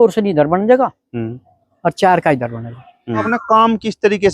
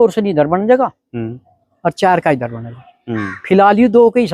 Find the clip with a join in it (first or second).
first